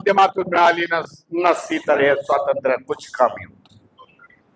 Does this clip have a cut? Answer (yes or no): no